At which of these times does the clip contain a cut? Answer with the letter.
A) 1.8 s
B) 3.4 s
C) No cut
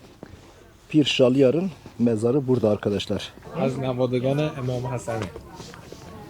B